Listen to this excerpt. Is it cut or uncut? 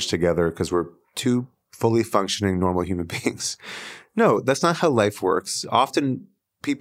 uncut